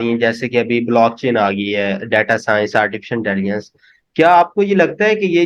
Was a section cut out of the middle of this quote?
no; 0 cuts

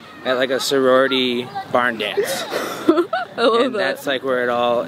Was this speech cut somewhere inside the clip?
no; 0 cuts

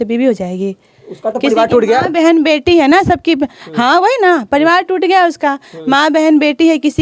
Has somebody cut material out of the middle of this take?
no; 0 cuts

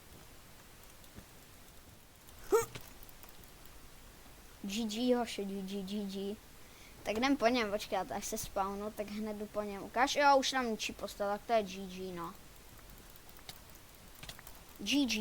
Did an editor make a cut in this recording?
yes; 1 cut; at 2.1 s

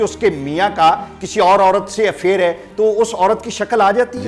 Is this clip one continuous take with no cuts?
yes; 0 cuts

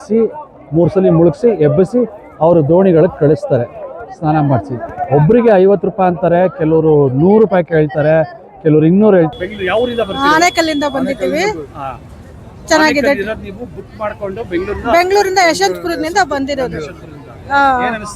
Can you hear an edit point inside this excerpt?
yes; 1 cut; at 9.3 s

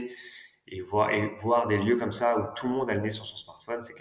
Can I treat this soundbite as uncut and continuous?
yes; 0 cuts

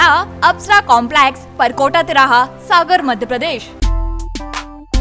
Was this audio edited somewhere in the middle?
yes; 1 cut; at 3.7 s

